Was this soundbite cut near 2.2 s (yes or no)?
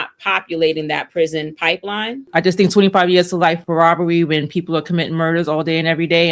yes